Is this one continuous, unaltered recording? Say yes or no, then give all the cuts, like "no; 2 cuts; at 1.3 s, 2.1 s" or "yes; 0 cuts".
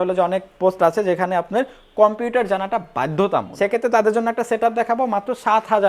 no; 1 cut; at 3.5 s